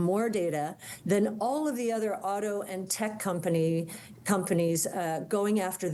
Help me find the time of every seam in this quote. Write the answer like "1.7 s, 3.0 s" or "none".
none